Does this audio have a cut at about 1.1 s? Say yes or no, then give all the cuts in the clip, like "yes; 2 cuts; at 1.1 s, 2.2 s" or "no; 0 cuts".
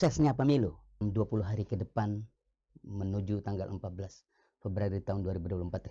yes; 1 cut; at 1.1 s